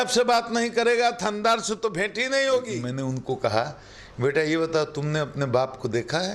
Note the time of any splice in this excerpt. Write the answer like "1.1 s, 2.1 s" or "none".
2.9 s